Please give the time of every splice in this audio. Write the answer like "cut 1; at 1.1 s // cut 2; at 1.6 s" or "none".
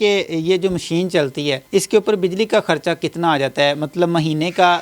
cut 1; at 1.6 s

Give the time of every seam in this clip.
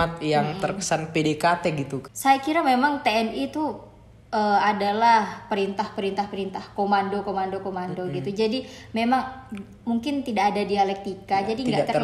cut 1; at 2.0 s

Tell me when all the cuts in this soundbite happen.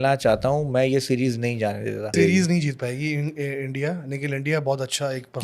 cut 1; at 2.2 s

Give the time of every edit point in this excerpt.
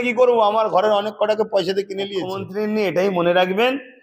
cut 1; at 2.4 s

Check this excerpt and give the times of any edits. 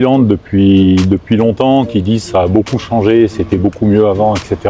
none

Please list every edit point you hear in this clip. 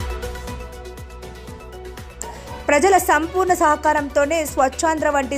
cut 1; at 1.3 s // cut 2; at 2.1 s

